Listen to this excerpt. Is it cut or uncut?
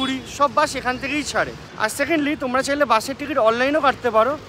uncut